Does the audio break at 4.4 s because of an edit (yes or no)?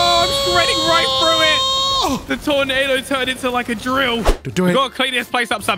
yes